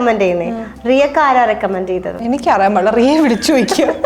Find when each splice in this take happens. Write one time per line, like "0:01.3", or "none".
0:02.2